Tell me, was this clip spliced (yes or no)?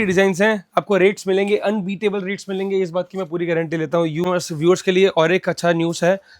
yes